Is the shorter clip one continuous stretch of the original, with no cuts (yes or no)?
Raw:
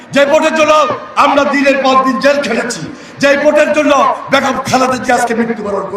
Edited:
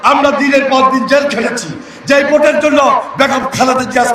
yes